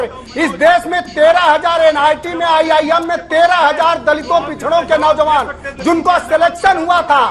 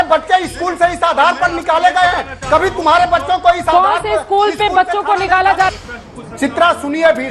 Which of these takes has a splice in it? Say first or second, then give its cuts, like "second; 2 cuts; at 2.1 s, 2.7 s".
second; 1 cut; at 5.7 s